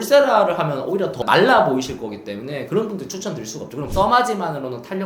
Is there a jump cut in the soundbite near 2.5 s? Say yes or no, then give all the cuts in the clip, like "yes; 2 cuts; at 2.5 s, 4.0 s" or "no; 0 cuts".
no; 2 cuts; at 1.1 s, 3.9 s